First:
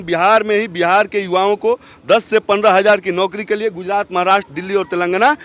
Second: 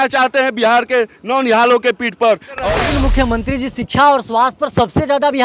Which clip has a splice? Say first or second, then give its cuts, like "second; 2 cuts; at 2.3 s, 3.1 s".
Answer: second; 1 cut; at 2.7 s